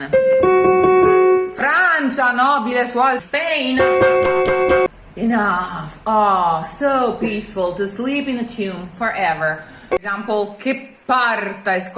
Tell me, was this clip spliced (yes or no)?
yes